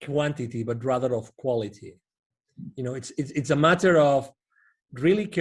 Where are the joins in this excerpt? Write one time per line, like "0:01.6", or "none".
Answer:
none